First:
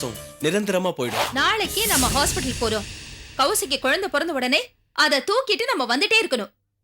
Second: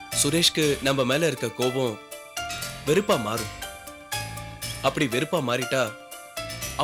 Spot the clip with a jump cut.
first; 1 cut; at 1.2 s

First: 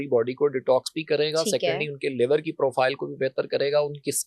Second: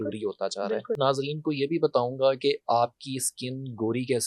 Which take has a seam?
second; 1 cut; at 0.9 s

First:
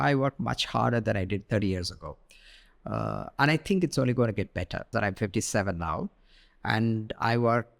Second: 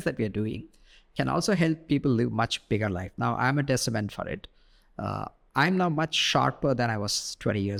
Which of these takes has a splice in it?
first; 1 cut; at 4.9 s

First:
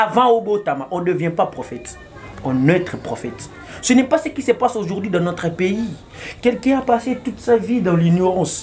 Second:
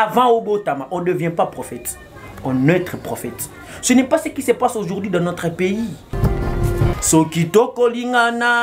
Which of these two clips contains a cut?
second; 1 cut; at 6.4 s

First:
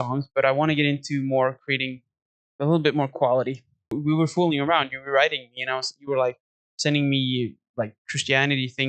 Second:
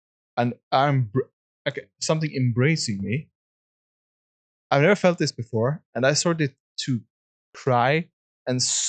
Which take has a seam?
first; 1 cut; at 3.9 s

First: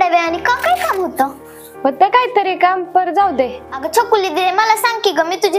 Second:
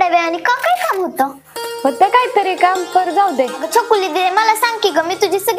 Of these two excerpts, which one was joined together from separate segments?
second; 1 cut; at 3.6 s

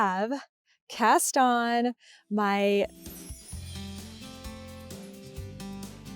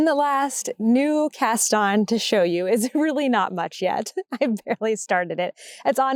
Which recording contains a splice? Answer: first; 1 cut; at 3.1 s

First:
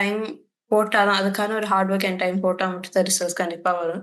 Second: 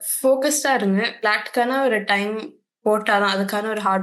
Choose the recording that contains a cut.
second; 1 cut; at 1.1 s

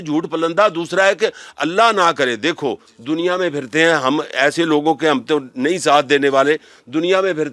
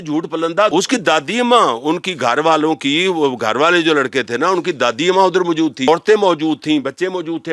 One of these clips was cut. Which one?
second; 2 cuts; at 0.7 s, 5.9 s

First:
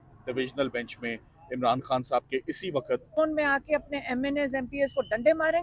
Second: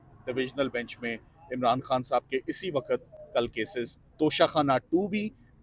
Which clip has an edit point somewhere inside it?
first; 1 cut; at 3.2 s

